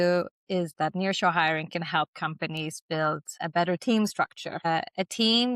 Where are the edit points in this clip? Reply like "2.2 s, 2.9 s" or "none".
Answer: 3.4 s, 4.7 s